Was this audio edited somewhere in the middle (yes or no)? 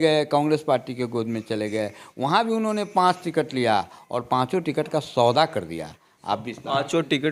no